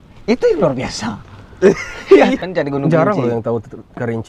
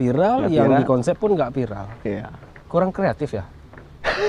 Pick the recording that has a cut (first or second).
first